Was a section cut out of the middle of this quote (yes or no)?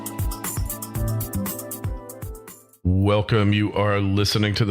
yes